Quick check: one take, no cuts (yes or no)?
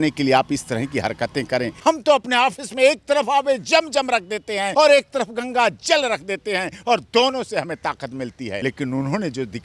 no